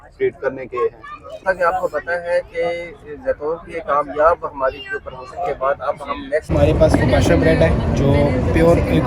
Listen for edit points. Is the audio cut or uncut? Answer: cut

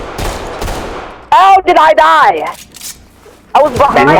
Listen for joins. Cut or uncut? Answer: uncut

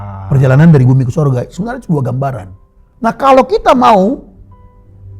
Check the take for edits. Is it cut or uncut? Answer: cut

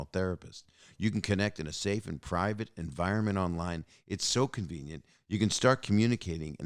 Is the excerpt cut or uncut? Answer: uncut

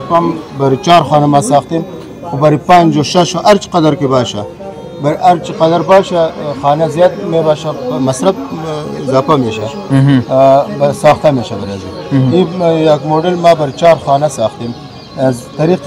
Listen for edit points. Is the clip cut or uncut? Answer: uncut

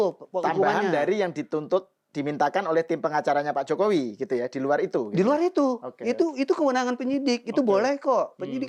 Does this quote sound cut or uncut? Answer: uncut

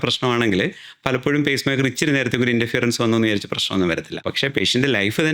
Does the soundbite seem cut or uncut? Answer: uncut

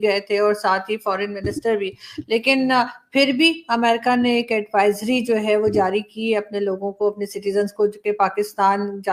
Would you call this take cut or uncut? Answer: uncut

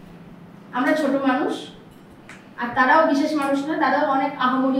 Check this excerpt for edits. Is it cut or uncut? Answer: uncut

